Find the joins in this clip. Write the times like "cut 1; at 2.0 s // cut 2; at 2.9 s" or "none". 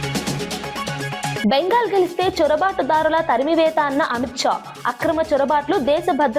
cut 1; at 1.4 s